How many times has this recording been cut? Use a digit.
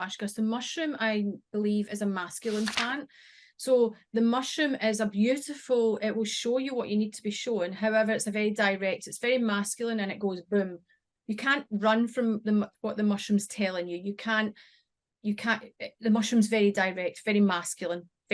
0